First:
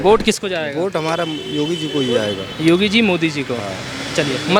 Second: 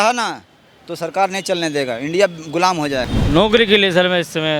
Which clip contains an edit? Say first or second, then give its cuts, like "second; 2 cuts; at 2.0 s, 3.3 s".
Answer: second; 1 cut; at 3.2 s